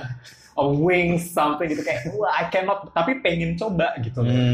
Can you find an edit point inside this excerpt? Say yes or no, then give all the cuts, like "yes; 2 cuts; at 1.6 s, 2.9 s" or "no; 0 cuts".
no; 0 cuts